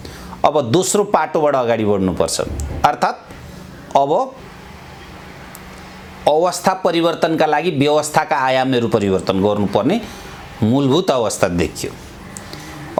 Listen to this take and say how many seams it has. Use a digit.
0